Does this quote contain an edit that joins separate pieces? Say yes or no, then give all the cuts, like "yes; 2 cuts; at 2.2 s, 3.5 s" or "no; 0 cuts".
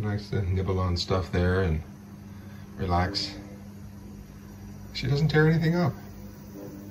no; 0 cuts